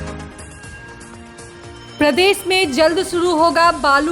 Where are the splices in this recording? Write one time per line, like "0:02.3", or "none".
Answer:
none